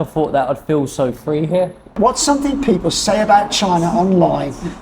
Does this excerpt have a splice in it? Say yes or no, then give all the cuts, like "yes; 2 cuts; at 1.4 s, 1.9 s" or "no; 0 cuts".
yes; 1 cut; at 1.9 s